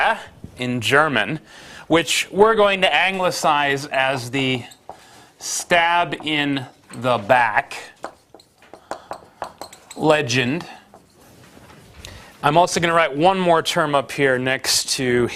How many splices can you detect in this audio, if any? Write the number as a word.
one